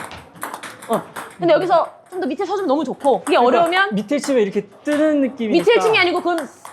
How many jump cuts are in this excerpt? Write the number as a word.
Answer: one